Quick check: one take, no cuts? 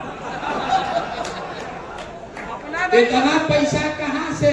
yes; 0 cuts

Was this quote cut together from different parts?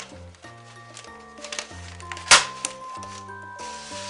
no; 0 cuts

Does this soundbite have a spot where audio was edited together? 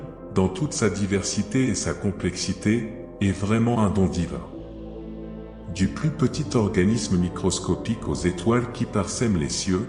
no; 0 cuts

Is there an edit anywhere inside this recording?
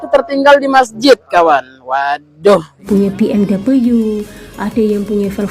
yes; 1 cut; at 2.9 s

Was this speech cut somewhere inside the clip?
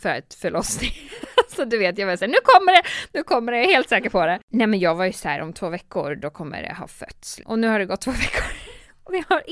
yes; 2 cuts; at 4.4 s, 7.4 s

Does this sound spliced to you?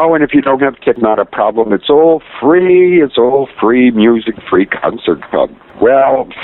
no; 0 cuts

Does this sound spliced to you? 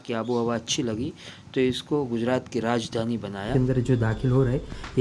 yes; 1 cut; at 3.5 s

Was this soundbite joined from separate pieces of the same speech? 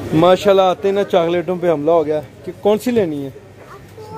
no; 0 cuts

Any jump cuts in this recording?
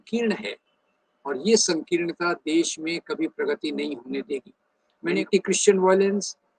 yes; 1 cut; at 5.1 s

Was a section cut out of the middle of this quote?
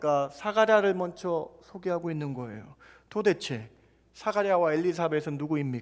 no; 0 cuts

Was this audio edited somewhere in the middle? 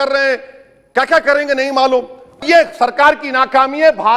yes; 1 cut; at 2.4 s

